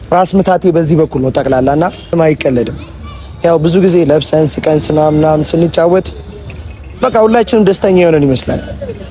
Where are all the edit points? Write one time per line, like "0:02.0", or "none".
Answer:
0:02.1